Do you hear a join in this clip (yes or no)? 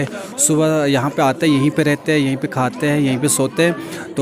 no